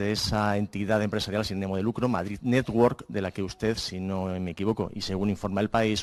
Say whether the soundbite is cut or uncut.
uncut